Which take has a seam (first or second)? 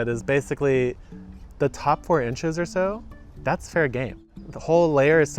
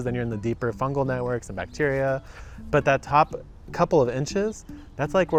first